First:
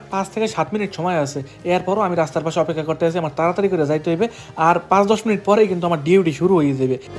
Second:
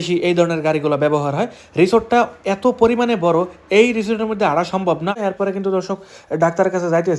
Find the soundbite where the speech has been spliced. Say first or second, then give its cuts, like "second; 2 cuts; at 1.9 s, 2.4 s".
second; 1 cut; at 5.2 s